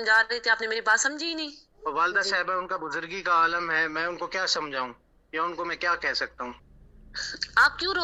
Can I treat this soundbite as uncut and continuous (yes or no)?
no